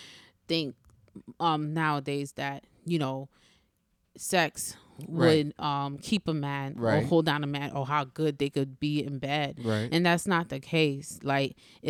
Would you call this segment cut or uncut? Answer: uncut